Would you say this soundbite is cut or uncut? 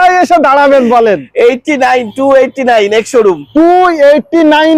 uncut